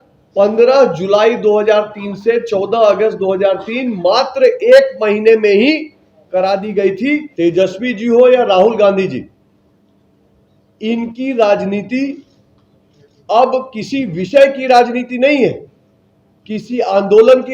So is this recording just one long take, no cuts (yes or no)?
no